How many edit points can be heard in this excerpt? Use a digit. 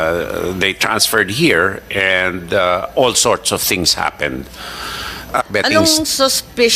1